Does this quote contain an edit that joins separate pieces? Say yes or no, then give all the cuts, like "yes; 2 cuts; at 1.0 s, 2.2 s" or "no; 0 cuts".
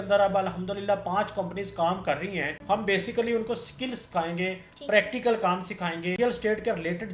yes; 2 cuts; at 2.5 s, 6.2 s